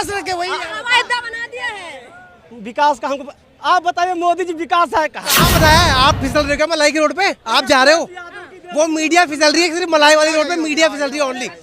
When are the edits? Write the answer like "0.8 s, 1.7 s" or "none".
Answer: 5.5 s